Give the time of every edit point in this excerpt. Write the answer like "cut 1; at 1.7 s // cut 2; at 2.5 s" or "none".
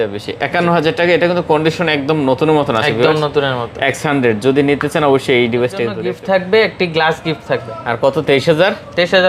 cut 1; at 5.9 s